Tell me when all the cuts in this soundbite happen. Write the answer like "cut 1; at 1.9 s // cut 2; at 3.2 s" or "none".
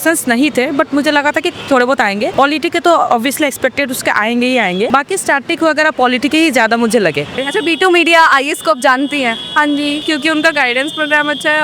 cut 1; at 2.3 s // cut 2; at 4.9 s // cut 3; at 7.4 s // cut 4; at 10.0 s